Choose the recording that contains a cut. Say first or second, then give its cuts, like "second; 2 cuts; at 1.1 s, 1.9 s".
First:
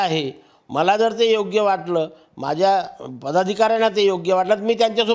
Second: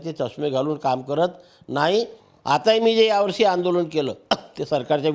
second; 1 cut; at 2.2 s